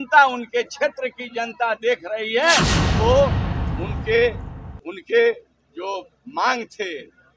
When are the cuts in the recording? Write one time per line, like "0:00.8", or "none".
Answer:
0:02.8